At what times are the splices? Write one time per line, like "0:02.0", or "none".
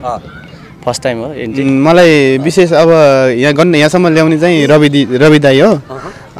0:01.6